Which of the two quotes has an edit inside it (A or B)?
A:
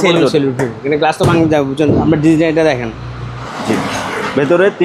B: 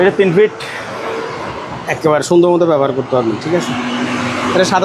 A